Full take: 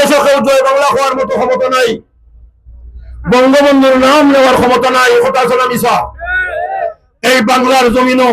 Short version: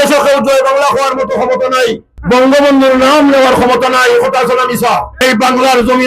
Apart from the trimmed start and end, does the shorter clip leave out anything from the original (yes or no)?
yes